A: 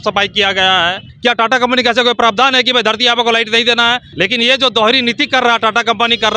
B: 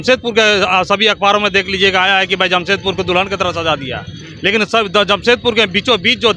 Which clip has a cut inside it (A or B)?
A